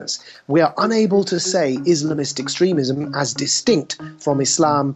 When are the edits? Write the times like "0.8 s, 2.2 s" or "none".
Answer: none